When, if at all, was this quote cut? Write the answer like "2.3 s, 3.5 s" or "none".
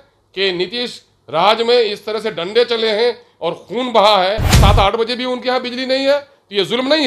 4.5 s